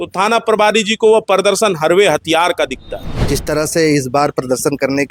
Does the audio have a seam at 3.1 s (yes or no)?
yes